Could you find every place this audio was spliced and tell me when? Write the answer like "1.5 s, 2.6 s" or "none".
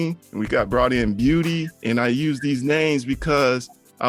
none